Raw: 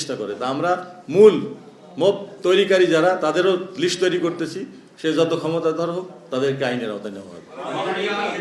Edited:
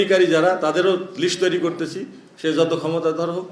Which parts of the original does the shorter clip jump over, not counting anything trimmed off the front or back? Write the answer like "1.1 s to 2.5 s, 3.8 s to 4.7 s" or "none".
none